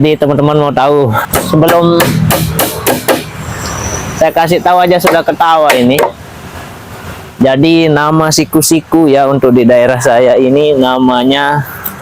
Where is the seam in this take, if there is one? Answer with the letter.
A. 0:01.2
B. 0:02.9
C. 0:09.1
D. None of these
A